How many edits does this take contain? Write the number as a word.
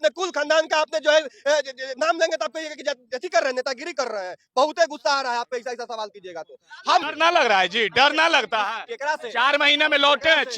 one